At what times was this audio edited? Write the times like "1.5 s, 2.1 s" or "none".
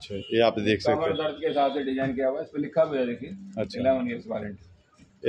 none